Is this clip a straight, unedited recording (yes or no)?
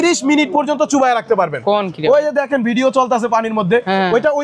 yes